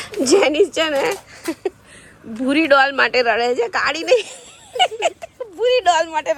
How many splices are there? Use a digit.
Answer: 0